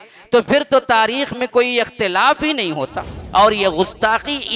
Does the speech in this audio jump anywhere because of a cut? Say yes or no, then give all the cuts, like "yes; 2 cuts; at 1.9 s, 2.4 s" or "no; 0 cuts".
yes; 1 cut; at 3.2 s